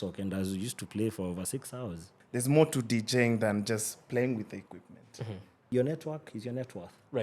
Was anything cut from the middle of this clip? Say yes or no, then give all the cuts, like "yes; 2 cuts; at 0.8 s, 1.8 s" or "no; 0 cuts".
yes; 2 cuts; at 2.1 s, 5.7 s